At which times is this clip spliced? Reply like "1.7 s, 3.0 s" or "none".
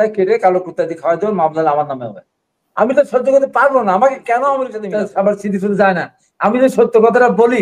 4.8 s